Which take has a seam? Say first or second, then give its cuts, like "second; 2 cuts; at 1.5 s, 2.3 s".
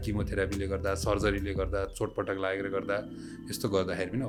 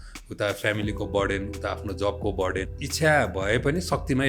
second; 1 cut; at 2.7 s